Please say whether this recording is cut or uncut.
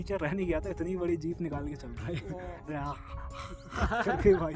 uncut